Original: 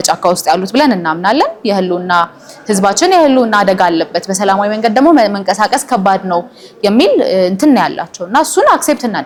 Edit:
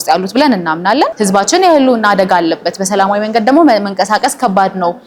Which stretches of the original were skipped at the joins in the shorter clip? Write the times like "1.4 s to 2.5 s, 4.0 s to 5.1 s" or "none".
1.5 s to 2.6 s

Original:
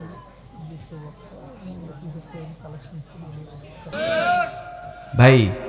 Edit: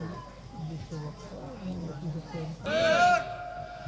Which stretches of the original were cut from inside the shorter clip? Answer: 2.6 s to 3.9 s

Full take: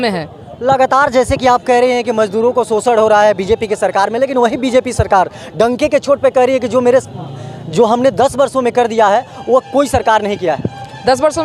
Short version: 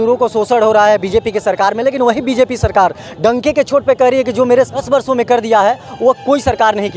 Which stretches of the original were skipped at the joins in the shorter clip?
7.2 s to 8.3 s

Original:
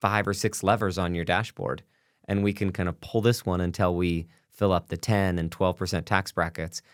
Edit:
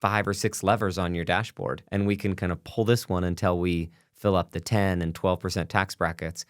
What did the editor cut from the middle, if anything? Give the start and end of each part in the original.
1.8 s to 2.2 s

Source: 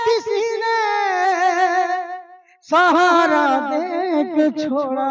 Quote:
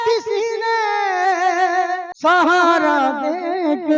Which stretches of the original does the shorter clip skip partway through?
2.1 s to 2.5 s

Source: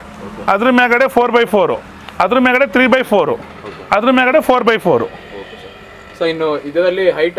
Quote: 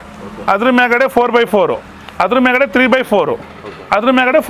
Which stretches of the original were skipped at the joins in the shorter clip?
none

